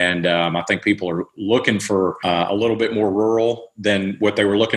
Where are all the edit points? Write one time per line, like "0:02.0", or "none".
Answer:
0:02.2